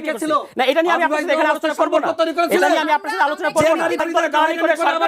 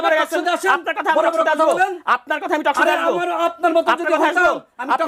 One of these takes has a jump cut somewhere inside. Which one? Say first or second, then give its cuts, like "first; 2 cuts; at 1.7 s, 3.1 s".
first; 1 cut; at 4.0 s